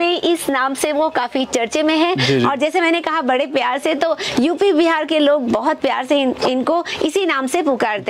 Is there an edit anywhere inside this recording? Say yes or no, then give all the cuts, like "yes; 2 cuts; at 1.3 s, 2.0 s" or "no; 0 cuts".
no; 0 cuts